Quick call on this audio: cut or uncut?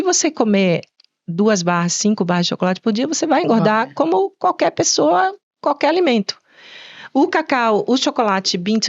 uncut